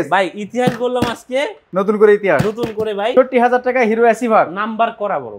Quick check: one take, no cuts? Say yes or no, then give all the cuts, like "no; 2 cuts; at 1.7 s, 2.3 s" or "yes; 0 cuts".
no; 2 cuts; at 1.6 s, 3.1 s